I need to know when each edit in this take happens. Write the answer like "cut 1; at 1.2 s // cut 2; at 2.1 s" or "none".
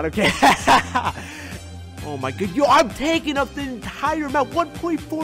cut 1; at 1.6 s